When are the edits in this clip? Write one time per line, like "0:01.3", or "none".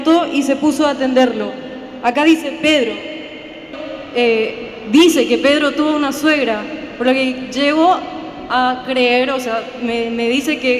0:03.8